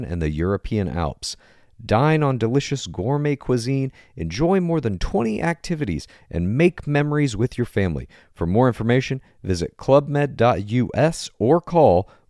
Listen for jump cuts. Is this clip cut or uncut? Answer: uncut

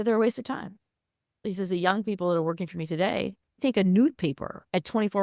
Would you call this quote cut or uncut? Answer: cut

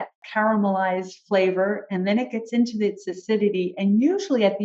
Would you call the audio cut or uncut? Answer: uncut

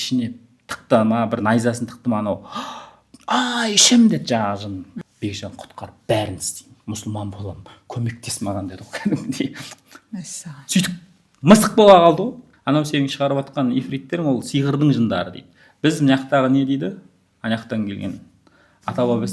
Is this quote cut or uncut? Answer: cut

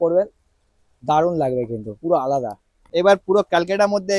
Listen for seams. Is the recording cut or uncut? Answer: cut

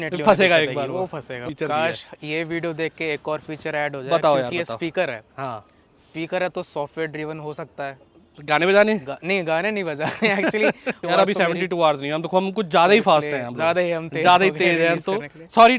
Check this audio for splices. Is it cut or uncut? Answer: cut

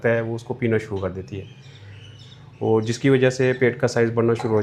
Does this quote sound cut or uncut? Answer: uncut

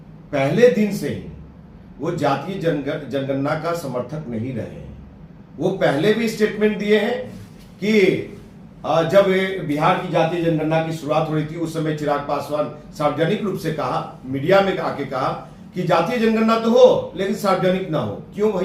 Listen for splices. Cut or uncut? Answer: uncut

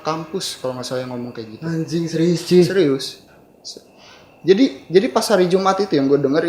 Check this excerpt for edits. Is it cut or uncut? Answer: uncut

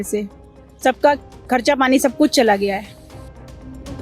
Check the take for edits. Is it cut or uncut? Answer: cut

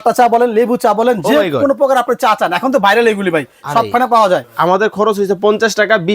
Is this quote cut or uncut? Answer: cut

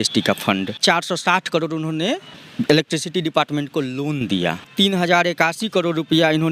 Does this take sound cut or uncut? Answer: cut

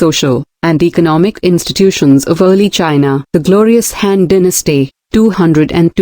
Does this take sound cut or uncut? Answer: cut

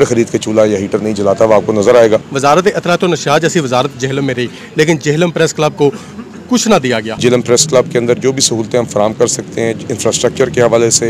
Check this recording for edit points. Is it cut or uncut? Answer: cut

